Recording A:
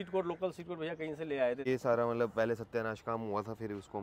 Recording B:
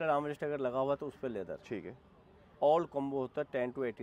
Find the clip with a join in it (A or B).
A